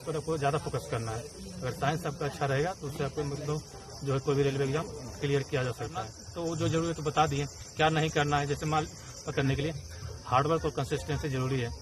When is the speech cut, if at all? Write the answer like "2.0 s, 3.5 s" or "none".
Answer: 6.2 s, 9.3 s